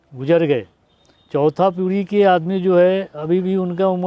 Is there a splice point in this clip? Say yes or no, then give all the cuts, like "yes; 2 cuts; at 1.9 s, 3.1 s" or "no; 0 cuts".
no; 0 cuts